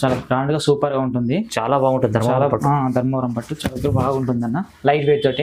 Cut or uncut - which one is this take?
uncut